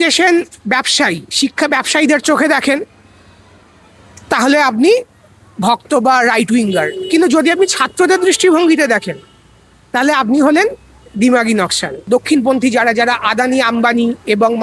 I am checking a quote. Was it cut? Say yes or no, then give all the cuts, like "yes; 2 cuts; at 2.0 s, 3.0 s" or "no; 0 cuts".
yes; 1 cut; at 12.1 s